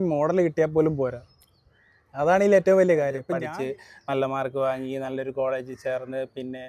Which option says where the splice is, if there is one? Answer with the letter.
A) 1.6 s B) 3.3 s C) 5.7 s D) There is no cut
B